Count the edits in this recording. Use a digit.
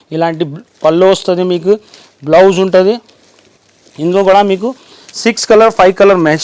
0